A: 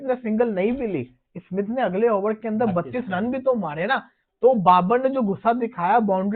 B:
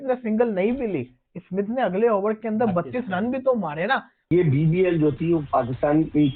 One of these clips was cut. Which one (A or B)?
B